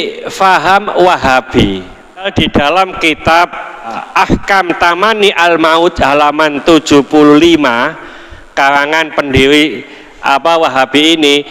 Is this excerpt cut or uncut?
cut